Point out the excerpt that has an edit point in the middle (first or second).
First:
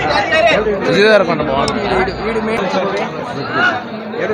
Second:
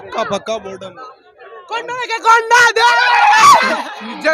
first